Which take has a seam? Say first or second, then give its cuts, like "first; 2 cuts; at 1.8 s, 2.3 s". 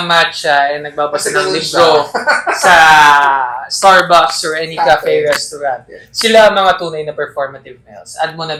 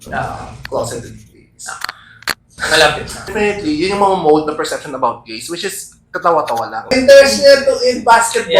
second; 2 cuts; at 3.2 s, 6.9 s